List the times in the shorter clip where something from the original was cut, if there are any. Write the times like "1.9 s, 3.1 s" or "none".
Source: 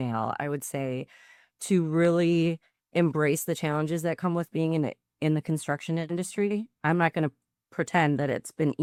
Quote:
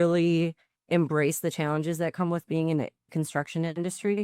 3.1 s